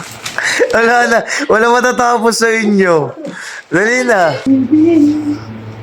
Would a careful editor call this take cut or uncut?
cut